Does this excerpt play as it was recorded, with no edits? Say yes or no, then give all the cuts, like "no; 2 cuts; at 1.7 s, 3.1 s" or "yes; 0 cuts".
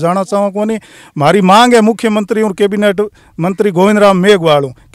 yes; 0 cuts